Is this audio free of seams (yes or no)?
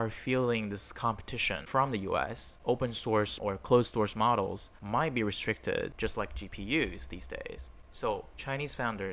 no